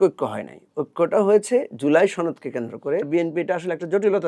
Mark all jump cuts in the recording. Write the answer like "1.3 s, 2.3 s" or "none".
3.1 s